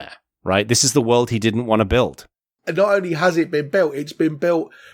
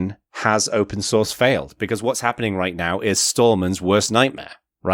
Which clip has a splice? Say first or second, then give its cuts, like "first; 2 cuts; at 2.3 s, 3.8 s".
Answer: first; 1 cut; at 2.6 s